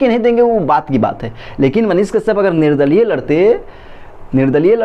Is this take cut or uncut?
uncut